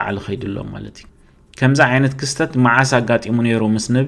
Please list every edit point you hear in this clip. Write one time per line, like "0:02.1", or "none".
0:01.1